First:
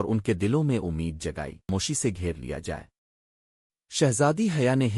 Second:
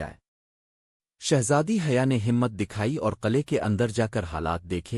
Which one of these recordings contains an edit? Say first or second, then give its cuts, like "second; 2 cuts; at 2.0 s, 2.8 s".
first; 1 cut; at 1.7 s